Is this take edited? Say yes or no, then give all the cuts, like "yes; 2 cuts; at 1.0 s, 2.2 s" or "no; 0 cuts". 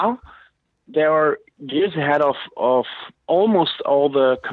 no; 0 cuts